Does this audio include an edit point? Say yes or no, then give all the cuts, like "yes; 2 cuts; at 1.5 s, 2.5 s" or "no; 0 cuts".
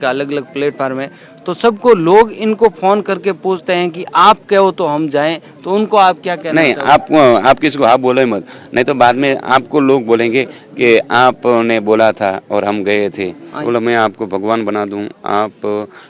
yes; 1 cut; at 13.5 s